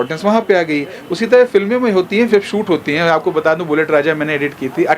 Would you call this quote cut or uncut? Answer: uncut